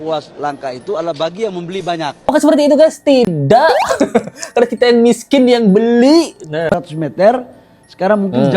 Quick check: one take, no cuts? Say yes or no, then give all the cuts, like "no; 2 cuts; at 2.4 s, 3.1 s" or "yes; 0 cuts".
no; 2 cuts; at 2.3 s, 6.7 s